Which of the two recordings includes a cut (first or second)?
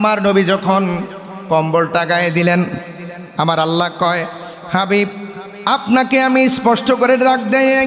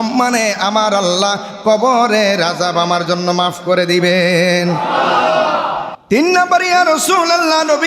second